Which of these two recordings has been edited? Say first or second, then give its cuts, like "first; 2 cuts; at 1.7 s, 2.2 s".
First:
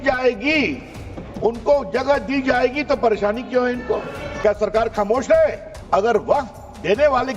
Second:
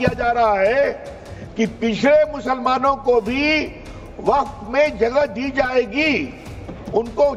first; 2 cuts; at 4.3 s, 5.7 s